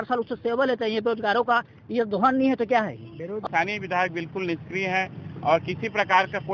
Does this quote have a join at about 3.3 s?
yes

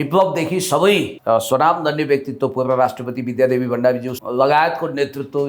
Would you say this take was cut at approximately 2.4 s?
no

